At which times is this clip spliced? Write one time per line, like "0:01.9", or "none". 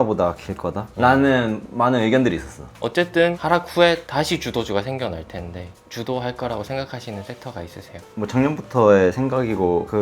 0:02.7